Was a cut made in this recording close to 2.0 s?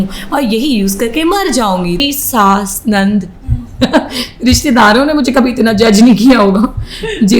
yes; 1 cut; at 2.0 s

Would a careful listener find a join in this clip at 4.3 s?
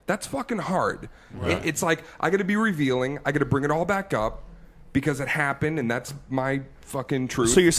no; 1 cut; at 1.6 s

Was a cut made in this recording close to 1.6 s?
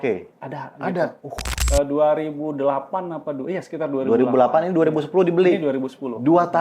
yes; 1 cut; at 1.6 s

